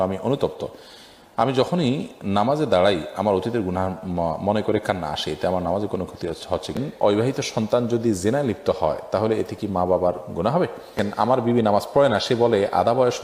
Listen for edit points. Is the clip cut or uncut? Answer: cut